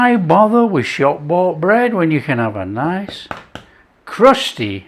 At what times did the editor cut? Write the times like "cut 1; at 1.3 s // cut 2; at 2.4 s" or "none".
none